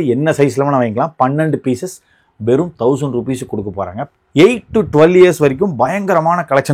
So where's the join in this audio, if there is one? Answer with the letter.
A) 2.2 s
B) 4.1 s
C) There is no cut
B